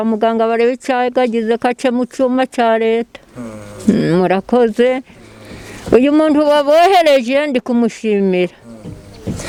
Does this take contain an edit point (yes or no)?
no